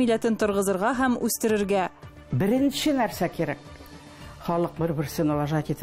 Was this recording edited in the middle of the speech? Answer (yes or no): no